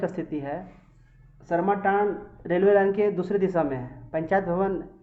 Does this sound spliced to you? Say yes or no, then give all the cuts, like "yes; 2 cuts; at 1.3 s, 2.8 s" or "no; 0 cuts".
no; 0 cuts